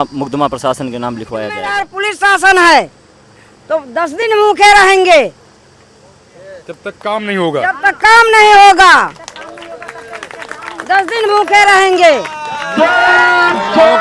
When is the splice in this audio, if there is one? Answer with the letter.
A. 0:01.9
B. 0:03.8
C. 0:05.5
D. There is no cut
A